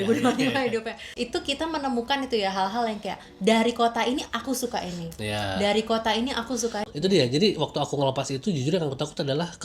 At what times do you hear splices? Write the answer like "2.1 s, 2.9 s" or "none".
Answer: 1.0 s, 6.8 s

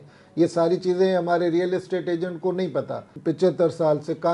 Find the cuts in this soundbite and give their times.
3.1 s

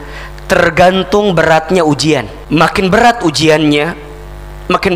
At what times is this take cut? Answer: 2.3 s

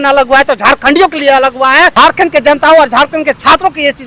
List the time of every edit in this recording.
1.9 s

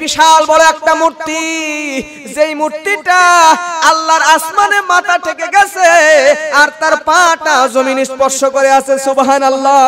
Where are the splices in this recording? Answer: none

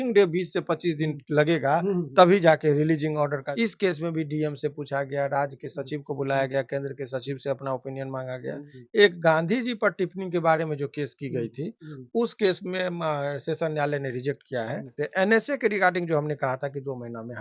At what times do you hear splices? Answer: 3.4 s, 8.7 s, 14.9 s

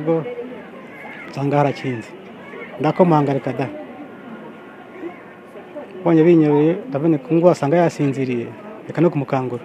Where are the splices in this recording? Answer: none

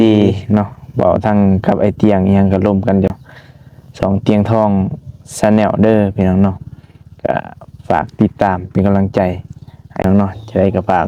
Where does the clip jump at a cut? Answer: 3.1 s, 10.0 s

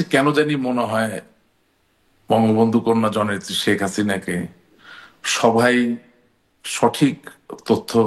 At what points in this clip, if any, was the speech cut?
none

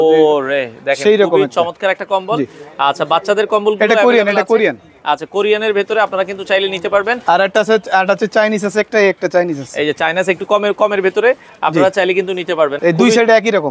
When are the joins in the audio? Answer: none

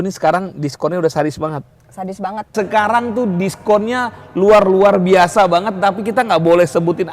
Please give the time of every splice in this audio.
2.5 s

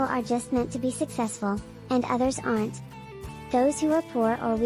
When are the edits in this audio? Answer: none

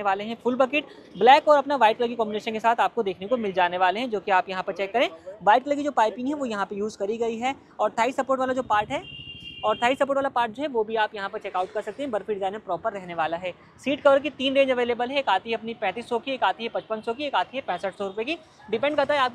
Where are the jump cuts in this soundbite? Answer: none

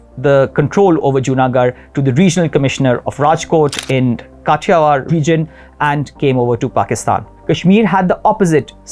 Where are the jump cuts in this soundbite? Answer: 5.0 s, 7.3 s

